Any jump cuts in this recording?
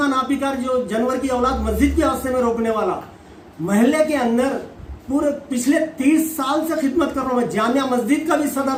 no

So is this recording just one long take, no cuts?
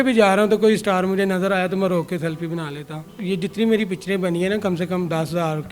no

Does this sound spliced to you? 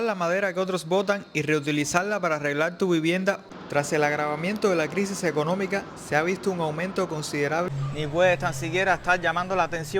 yes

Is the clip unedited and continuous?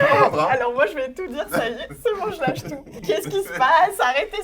no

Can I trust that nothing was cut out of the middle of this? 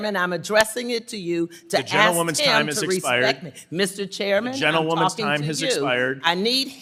yes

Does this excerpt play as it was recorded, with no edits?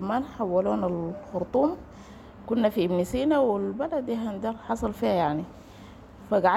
yes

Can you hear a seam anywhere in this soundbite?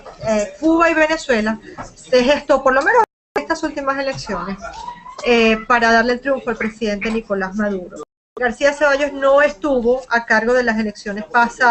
no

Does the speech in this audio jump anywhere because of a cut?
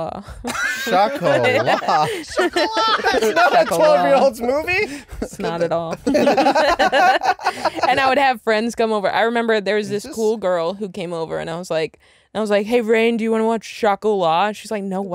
no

